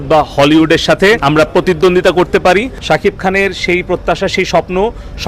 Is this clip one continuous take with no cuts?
no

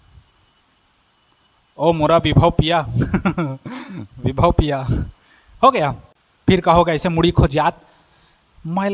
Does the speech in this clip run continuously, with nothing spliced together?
no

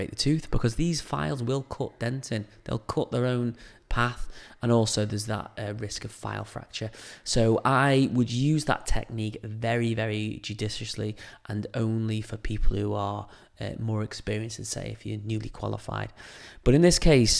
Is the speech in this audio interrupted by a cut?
no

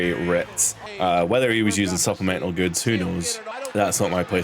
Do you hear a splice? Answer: yes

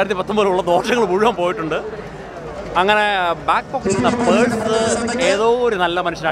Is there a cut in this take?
no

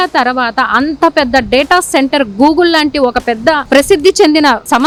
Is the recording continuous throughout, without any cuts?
yes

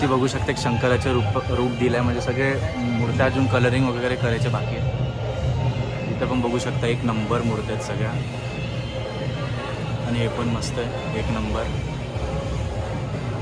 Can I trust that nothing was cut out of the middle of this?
yes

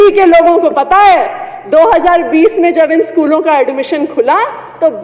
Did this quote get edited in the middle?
no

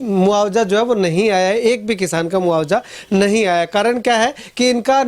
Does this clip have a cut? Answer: no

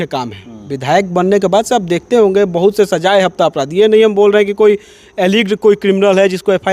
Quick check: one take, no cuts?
yes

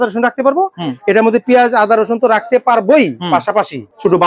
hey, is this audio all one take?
yes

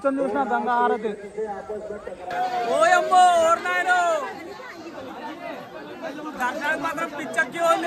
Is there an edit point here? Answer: yes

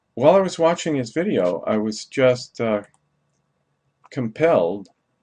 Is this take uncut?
no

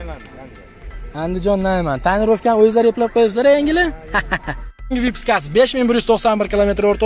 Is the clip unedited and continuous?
no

